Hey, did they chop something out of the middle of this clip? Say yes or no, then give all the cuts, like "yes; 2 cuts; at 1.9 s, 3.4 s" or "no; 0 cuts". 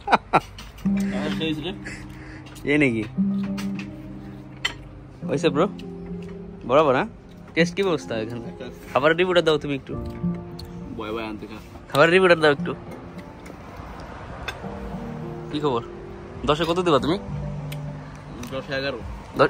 no; 0 cuts